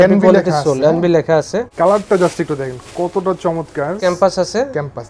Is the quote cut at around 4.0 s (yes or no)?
yes